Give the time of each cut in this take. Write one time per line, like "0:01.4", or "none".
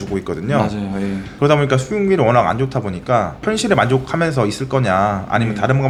none